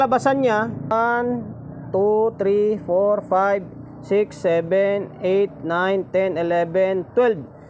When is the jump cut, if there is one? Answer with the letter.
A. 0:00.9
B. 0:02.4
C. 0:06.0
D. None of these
A